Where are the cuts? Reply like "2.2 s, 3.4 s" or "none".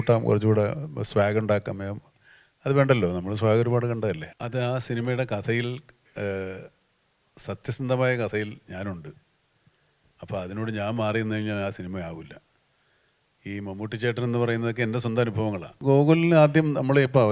4.3 s, 15.7 s